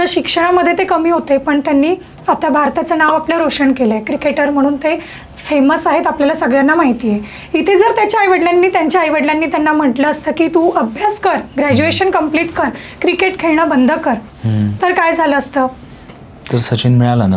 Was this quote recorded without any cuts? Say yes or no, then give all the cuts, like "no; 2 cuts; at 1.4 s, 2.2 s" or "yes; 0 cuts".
yes; 0 cuts